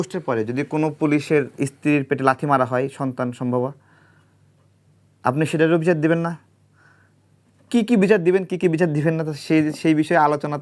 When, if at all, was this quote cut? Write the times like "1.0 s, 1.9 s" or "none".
none